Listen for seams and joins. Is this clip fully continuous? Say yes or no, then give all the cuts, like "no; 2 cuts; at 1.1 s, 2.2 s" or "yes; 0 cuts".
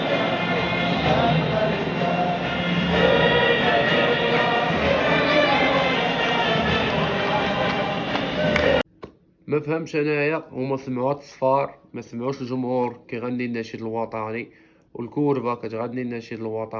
yes; 0 cuts